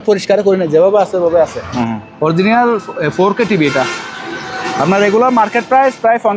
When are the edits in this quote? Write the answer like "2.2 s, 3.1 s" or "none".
1.7 s